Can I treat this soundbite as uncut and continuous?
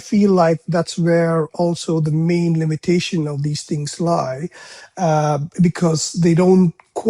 yes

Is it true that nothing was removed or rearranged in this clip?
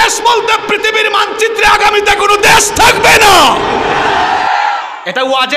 yes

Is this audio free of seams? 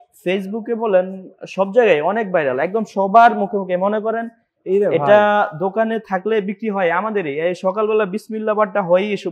yes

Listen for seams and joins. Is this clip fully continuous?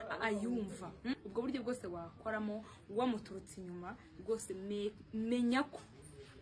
no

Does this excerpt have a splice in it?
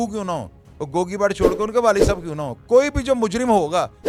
no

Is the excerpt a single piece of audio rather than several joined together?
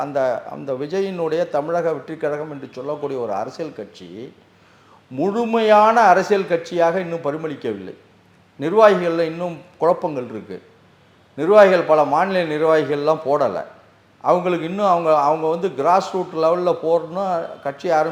yes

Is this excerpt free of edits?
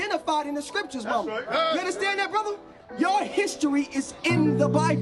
yes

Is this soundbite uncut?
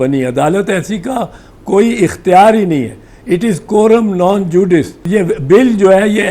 no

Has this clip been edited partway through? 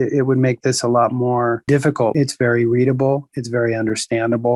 yes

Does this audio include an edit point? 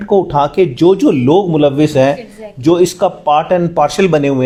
no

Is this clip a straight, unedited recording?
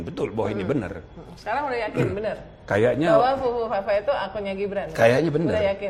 yes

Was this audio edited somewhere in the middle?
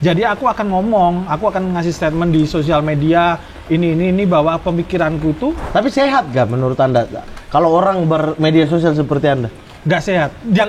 yes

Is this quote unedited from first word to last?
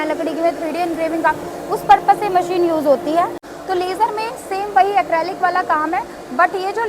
no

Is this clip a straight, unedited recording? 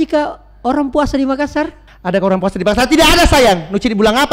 no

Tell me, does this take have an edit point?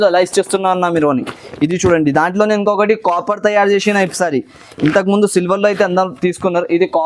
no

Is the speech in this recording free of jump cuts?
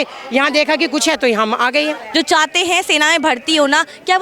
no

